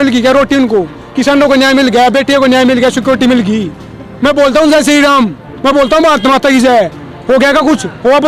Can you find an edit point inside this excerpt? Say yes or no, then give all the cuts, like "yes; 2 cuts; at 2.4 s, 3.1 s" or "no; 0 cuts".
no; 0 cuts